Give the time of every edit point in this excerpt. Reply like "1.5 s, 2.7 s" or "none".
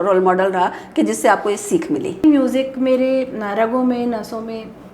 2.2 s